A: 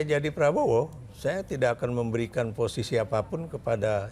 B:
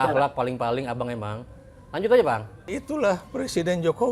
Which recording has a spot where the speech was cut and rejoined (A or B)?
B